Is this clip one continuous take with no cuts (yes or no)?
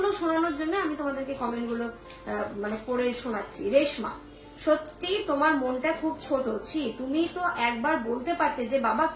yes